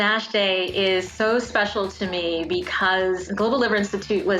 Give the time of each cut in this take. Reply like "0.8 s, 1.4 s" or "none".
1.1 s, 3.3 s